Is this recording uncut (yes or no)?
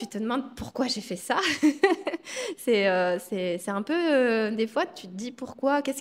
yes